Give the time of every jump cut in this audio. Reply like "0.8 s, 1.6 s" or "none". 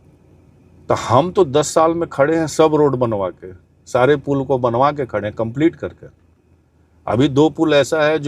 none